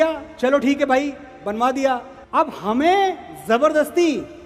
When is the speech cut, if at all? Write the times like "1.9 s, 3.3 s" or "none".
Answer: 2.1 s